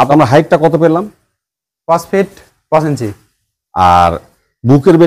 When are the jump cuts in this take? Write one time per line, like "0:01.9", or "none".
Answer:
none